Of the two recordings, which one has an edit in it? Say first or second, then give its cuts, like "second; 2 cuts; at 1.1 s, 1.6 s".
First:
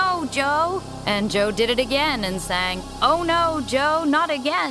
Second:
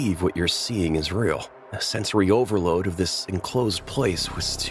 first; 2 cuts; at 0.9 s, 2.8 s